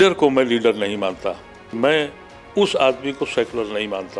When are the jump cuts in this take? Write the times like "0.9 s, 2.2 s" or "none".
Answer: 1.8 s